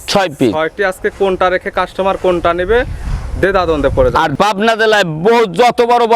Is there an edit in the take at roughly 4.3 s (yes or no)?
yes